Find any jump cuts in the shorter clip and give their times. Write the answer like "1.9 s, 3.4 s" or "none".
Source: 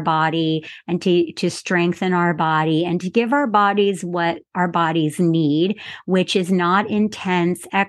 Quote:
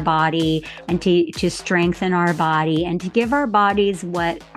none

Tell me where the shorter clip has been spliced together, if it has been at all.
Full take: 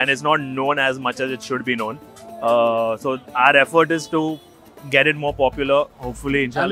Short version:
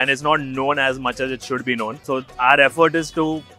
2.0 s

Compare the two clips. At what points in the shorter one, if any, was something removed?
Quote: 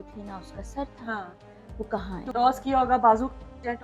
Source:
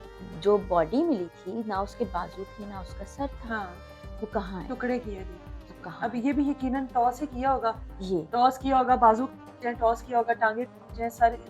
2.3 s

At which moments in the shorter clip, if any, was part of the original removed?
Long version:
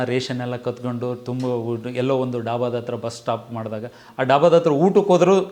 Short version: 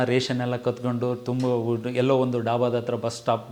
none

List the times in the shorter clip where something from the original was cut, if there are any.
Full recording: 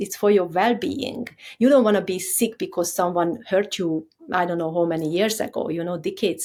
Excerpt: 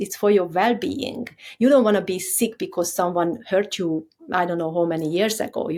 none

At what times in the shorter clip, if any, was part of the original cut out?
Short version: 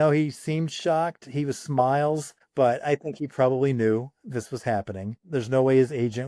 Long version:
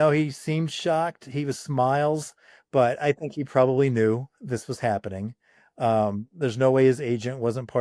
2.4 s, 5.2 s

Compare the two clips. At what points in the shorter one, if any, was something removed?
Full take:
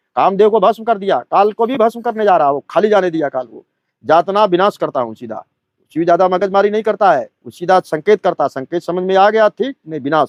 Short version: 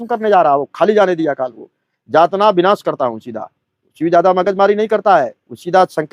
none

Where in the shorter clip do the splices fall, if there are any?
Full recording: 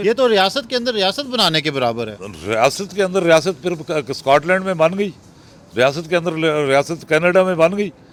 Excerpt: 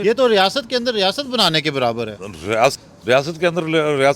2.8 s

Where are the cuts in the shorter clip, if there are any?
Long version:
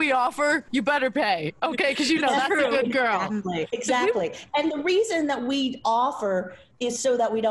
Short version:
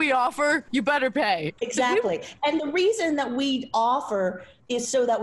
1.6 s

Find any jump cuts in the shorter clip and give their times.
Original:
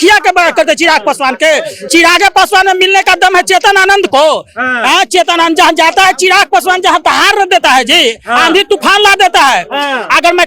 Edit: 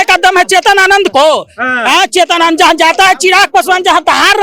none

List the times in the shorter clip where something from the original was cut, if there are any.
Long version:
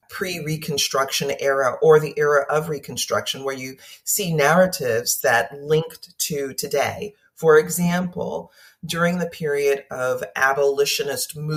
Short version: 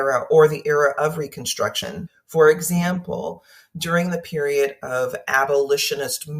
2.0 s

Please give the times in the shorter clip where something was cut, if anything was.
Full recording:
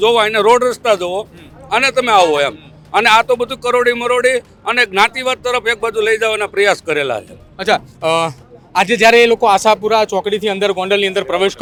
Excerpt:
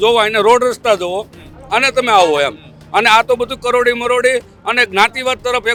none

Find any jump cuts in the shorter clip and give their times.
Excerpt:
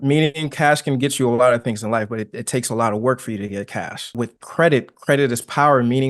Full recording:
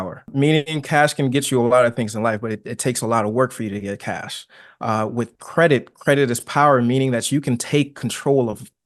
4.1 s

